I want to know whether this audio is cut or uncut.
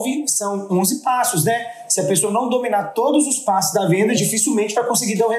cut